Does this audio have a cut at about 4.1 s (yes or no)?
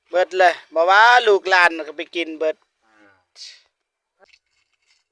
yes